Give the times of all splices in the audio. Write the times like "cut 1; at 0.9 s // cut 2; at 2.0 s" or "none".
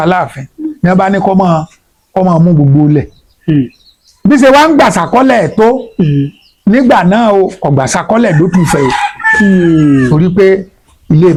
none